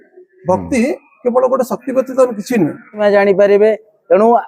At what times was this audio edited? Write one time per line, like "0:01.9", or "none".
0:03.0